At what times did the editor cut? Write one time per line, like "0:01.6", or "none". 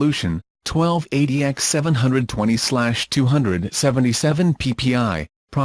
none